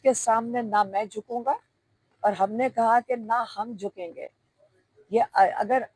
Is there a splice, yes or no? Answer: no